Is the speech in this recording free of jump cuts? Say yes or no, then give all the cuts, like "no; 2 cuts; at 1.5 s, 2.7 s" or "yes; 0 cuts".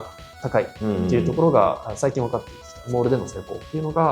no; 1 cut; at 2.9 s